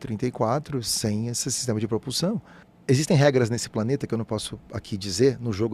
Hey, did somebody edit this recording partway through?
yes; 1 cut; at 2.6 s

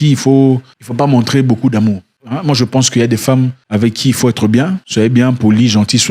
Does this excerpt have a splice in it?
no; 0 cuts

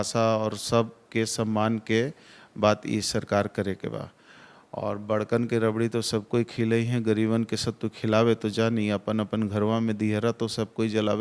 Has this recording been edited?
no; 0 cuts

